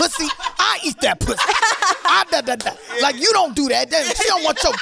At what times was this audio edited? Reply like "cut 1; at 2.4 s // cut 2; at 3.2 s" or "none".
none